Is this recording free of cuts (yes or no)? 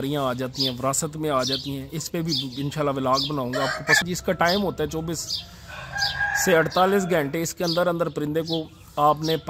no